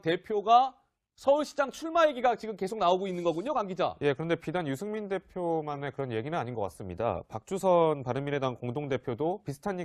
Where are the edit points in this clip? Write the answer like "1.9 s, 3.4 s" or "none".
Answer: 7.3 s